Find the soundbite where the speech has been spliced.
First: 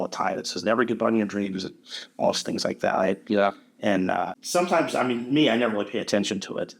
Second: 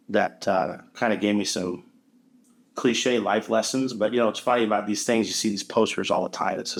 first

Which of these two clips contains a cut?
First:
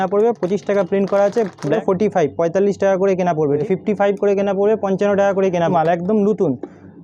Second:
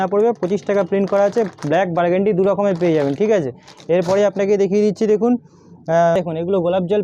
first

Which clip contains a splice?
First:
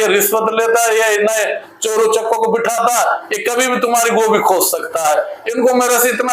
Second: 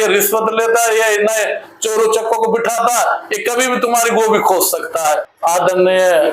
second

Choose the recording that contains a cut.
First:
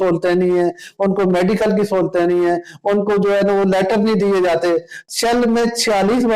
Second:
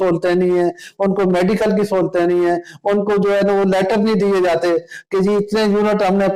first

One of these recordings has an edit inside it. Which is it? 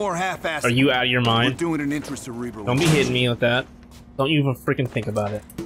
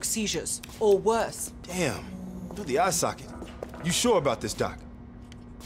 second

